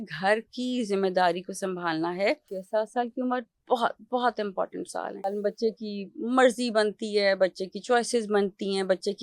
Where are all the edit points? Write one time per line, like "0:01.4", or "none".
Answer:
0:02.5
0:05.3